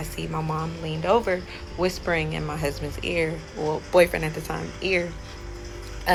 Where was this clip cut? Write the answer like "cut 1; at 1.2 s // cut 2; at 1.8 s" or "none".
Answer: none